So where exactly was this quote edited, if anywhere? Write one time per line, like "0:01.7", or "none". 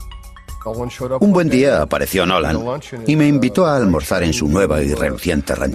0:02.4